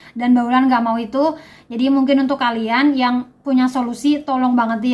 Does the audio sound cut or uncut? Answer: uncut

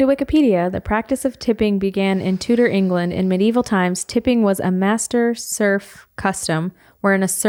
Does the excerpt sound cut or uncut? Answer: uncut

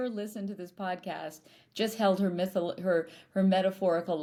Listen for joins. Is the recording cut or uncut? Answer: uncut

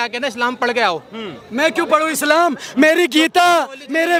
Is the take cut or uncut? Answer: uncut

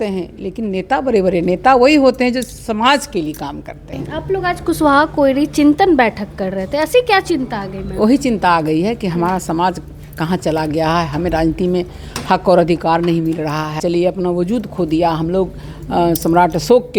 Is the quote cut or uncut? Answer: cut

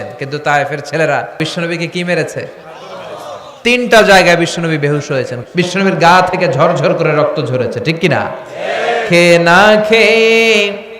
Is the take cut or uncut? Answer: cut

